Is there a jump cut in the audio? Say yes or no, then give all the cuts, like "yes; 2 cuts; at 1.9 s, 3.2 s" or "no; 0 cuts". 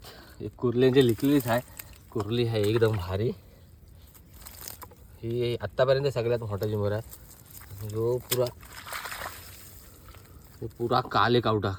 no; 0 cuts